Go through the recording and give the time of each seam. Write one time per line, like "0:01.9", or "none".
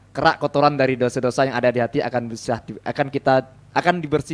none